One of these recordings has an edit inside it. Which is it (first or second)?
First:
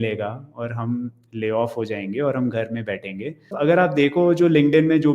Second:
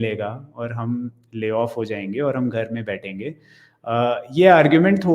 first